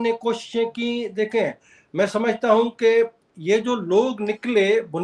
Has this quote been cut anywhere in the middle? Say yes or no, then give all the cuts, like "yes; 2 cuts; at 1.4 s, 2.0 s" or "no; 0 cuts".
no; 0 cuts